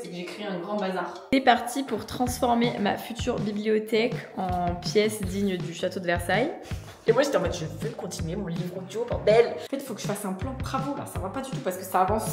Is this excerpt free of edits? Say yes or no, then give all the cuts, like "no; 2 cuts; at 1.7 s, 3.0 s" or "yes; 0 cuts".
no; 3 cuts; at 1.2 s, 7.0 s, 9.6 s